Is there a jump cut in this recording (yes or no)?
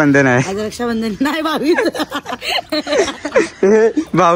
yes